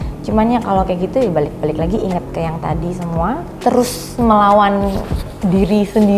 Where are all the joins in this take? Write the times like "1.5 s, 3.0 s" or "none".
3.5 s